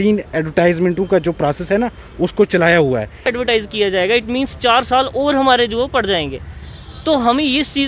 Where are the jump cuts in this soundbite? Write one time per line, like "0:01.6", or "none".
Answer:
0:03.3